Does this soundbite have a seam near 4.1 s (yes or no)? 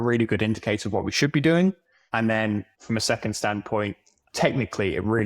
yes